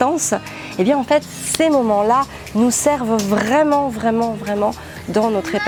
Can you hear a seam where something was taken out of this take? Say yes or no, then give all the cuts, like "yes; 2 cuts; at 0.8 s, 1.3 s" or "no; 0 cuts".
no; 0 cuts